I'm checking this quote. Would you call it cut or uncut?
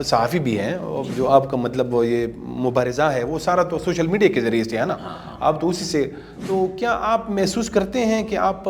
cut